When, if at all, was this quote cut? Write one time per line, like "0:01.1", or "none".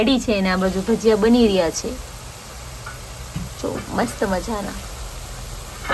none